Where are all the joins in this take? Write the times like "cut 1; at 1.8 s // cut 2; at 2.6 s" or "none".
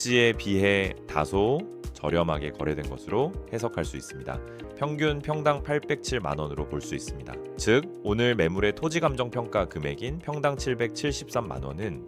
cut 1; at 4.6 s